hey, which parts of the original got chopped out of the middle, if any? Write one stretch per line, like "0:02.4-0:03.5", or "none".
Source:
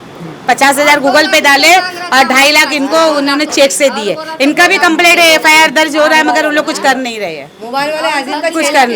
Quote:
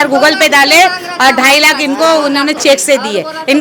none

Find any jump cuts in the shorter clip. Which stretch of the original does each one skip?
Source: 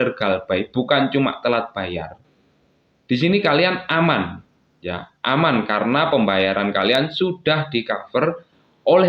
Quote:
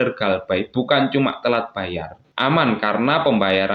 0:02.2-0:05.1

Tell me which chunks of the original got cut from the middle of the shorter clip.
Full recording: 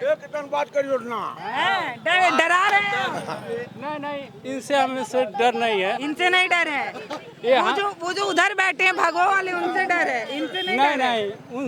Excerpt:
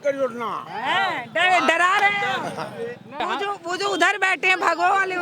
0:03.9-0:07.6

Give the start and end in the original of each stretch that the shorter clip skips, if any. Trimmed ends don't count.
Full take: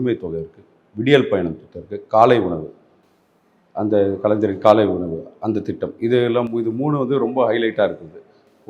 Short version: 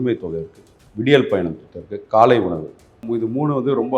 0:03.1-0:06.5

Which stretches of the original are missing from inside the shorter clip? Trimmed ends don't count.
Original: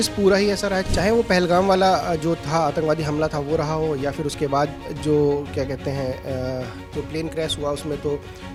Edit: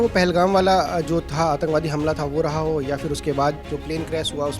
0:04.8-0:06.9

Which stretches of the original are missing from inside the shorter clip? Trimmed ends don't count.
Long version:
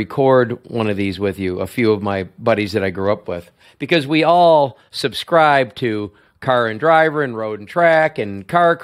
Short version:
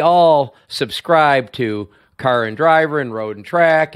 none

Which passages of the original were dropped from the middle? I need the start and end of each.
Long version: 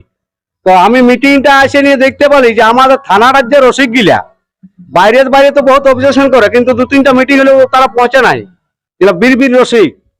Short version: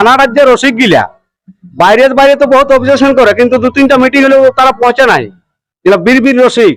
none

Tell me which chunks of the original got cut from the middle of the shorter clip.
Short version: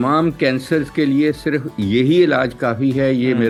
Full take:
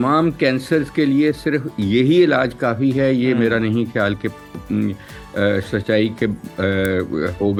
none

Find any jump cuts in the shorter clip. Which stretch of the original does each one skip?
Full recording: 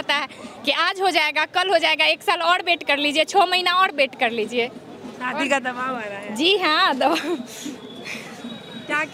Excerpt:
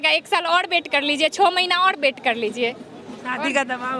none

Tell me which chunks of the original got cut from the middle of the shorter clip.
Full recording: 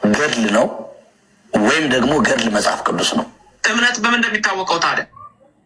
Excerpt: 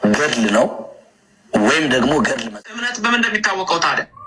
0:02.4-0:03.4

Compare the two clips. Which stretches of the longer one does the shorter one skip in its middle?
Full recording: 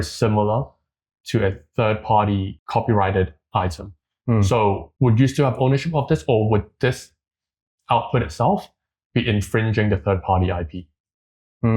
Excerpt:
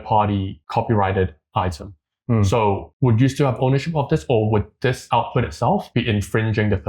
0:07.0-0:07.8
0:08.7-0:09.1

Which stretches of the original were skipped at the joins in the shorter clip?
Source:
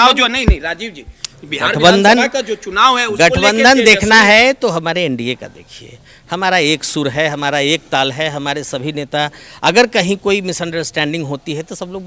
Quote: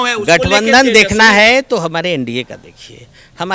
none

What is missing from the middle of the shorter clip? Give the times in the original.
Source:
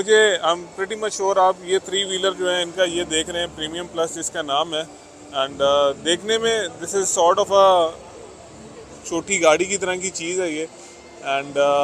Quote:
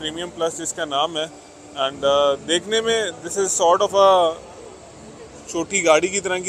none

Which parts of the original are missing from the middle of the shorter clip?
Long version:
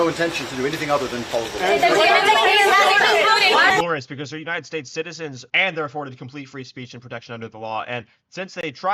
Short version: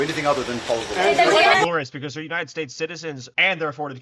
0:02.2-0:03.7

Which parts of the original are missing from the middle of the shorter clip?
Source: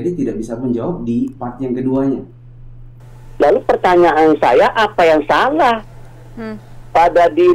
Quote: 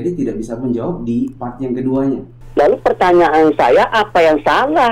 0:02.4-0:03.2

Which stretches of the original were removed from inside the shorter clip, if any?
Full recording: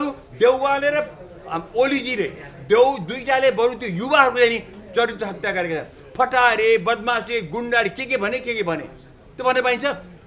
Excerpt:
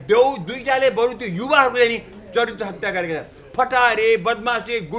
none

